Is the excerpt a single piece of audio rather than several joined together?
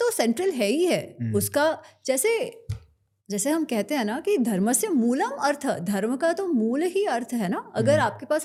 yes; 0 cuts

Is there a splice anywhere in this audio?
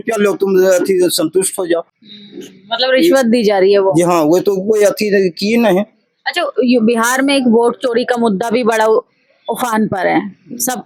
no; 0 cuts

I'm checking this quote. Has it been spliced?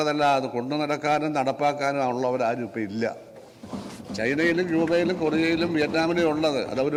no; 0 cuts

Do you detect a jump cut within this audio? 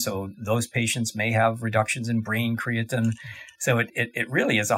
no; 0 cuts

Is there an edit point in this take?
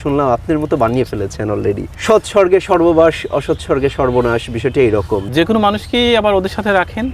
yes; 2 cuts; at 1.9 s, 5.3 s

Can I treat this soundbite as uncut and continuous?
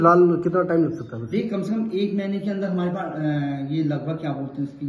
yes; 0 cuts

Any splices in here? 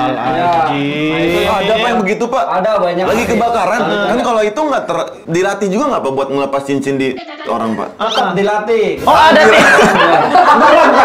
yes; 1 cut; at 3.8 s

